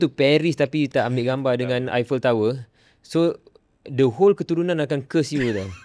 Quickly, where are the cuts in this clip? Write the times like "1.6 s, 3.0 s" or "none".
0.9 s

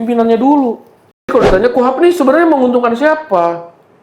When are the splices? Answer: 1.3 s

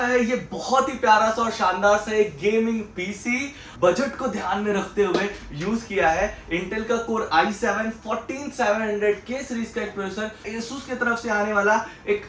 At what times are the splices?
3.6 s, 10.5 s

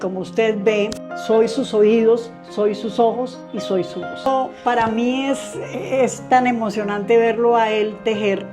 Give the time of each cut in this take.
1.1 s, 4.3 s

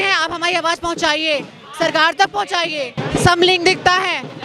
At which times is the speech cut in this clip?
3.0 s

